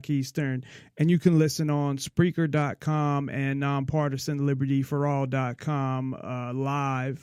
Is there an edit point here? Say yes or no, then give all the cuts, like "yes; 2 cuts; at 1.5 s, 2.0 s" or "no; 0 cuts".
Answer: no; 0 cuts